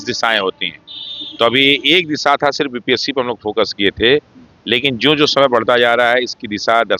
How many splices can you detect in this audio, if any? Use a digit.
0